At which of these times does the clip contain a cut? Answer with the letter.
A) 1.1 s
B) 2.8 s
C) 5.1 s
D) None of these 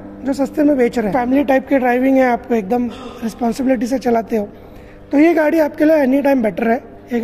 A